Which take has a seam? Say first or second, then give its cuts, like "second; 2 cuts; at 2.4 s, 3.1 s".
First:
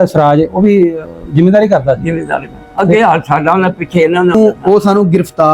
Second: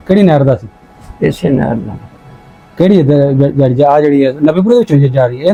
first; 1 cut; at 4.3 s